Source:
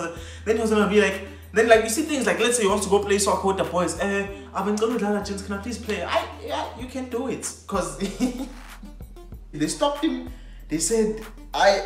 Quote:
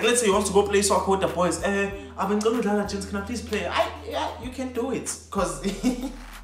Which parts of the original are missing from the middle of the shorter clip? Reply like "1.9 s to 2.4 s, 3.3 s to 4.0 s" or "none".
none